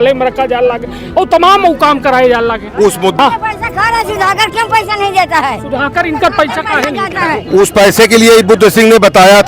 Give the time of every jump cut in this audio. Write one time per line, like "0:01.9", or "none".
0:03.2